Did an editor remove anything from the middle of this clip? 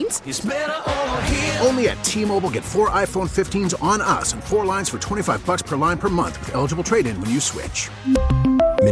no; 0 cuts

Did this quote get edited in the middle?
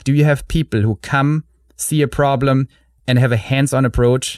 no; 0 cuts

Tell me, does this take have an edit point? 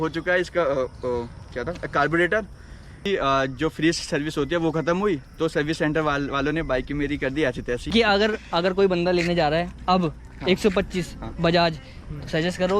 yes; 2 cuts; at 3.1 s, 7.9 s

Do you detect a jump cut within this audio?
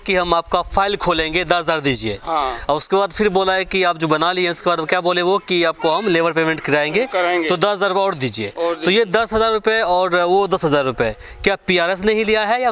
no; 0 cuts

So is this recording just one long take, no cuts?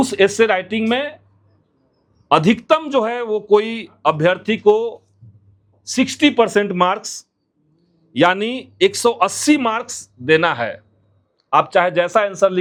yes; 0 cuts

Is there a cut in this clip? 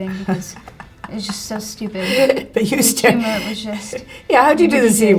no; 0 cuts

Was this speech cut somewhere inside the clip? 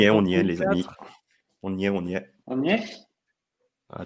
yes; 1 cut; at 2.3 s

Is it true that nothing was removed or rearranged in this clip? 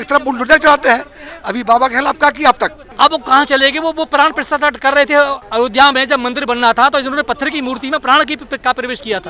no; 2 cuts; at 2.8 s, 5.4 s

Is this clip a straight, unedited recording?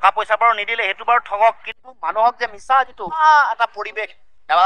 no; 1 cut; at 3.2 s

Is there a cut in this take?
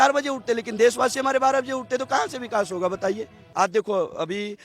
yes; 1 cut; at 3.4 s

